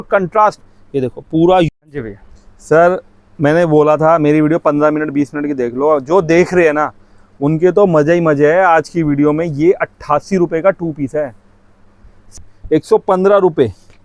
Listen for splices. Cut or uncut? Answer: cut